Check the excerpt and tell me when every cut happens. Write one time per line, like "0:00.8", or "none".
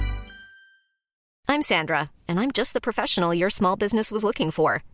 0:01.2